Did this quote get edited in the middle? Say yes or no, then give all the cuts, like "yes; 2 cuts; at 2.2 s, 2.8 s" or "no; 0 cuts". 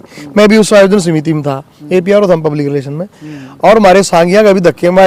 no; 0 cuts